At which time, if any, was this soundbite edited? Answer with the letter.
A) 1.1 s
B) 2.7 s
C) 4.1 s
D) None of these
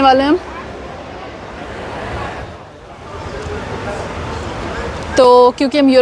B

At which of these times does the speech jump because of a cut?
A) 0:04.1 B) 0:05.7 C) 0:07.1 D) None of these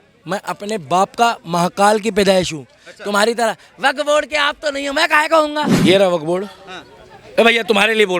B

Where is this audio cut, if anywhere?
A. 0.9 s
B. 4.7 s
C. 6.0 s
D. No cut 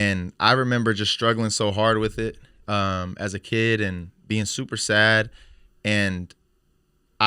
D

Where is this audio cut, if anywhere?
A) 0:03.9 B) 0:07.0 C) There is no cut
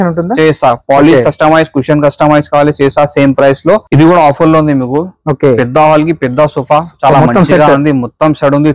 A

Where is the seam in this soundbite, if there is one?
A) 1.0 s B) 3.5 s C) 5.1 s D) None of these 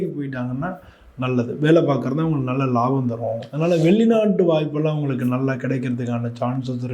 B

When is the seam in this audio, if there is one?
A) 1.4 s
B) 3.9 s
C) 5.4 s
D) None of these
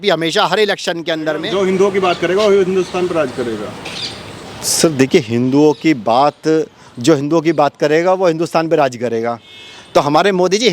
A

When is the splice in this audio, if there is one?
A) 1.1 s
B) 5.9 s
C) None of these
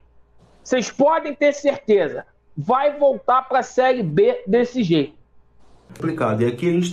B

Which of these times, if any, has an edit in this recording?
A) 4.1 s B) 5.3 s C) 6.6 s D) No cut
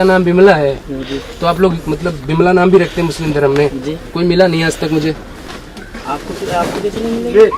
D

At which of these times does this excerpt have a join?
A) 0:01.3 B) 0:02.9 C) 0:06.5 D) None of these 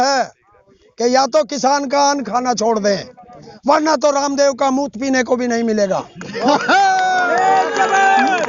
D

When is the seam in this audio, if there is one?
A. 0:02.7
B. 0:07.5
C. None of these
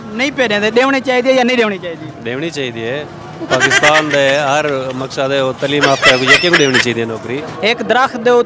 B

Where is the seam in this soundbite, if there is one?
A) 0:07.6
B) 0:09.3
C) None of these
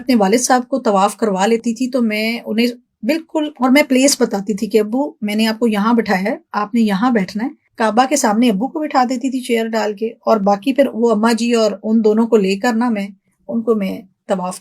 A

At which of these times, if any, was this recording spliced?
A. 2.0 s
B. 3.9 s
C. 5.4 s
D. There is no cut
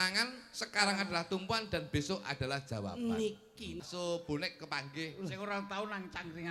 B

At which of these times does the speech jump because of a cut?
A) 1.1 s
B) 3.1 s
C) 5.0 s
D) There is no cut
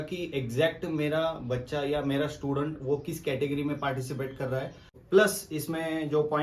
C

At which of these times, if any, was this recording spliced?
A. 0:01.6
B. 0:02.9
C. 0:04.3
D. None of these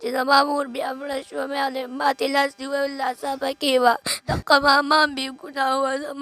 C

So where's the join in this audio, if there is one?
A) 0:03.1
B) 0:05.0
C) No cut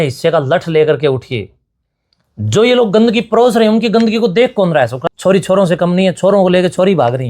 B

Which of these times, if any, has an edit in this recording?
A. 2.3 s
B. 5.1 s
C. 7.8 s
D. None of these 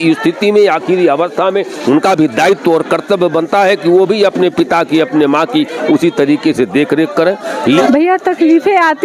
C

